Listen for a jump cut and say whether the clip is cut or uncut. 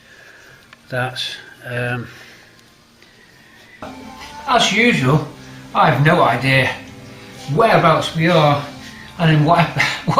cut